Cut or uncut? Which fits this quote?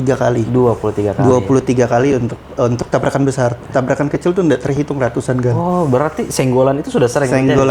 uncut